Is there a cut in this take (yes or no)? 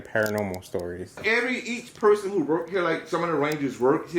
yes